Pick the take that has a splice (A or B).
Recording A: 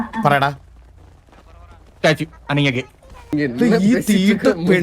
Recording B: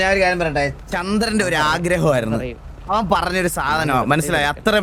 A